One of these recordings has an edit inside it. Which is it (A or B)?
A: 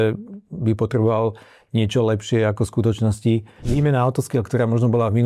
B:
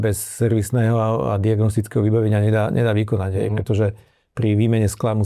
A